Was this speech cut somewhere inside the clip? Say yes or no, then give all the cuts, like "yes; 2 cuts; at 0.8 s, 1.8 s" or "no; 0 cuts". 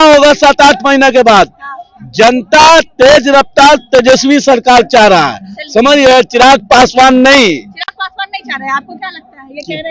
no; 0 cuts